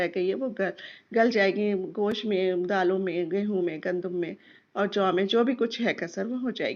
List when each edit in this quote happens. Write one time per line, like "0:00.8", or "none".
none